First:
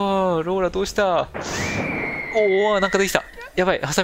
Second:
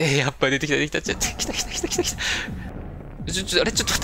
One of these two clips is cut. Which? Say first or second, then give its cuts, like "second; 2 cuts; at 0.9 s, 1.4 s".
second; 1 cut; at 2.7 s